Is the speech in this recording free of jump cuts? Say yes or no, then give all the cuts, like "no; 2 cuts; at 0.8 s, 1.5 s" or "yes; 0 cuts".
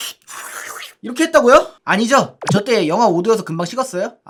yes; 0 cuts